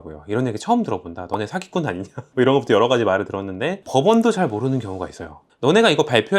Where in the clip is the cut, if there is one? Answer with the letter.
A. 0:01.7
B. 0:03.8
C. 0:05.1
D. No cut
B